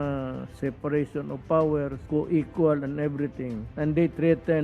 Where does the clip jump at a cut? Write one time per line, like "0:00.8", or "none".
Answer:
0:02.0
0:03.6

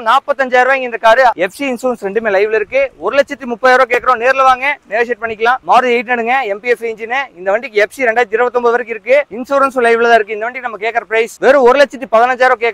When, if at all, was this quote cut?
0:01.4
0:05.6

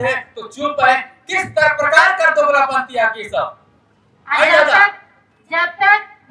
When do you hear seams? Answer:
none

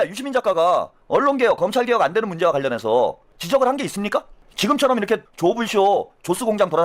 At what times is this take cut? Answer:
0:01.0
0:03.3
0:04.4
0:05.3

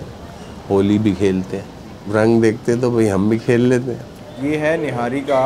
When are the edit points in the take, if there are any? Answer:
0:04.3

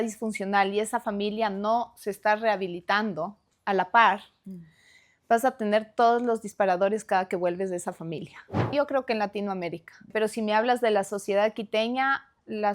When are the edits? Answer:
0:08.7
0:10.1

